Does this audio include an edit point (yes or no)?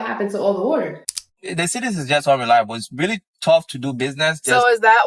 yes